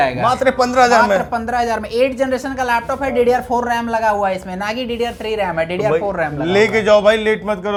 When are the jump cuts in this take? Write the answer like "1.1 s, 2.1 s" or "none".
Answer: none